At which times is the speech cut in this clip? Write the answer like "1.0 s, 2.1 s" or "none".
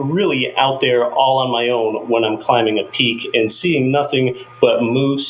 none